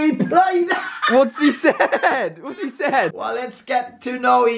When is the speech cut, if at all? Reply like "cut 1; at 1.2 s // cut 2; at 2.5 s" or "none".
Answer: cut 1; at 3.2 s